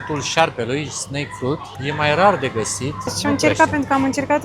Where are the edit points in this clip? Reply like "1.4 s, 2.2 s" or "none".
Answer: 1.7 s, 3.2 s